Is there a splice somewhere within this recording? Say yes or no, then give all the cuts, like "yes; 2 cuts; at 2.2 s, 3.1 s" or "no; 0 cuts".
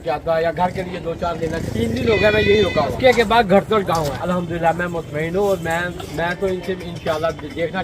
yes; 3 cuts; at 1.6 s, 2.9 s, 4.2 s